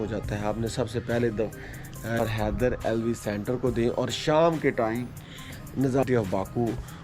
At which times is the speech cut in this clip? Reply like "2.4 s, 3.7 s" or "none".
2.2 s, 6.0 s